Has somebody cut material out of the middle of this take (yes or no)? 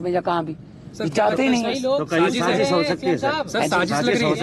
no